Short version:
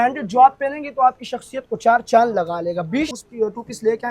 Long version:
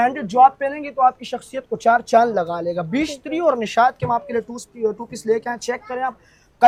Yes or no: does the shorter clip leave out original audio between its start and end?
yes